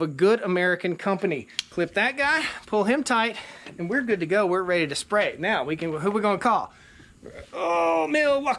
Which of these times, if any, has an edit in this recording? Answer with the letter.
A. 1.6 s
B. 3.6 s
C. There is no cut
A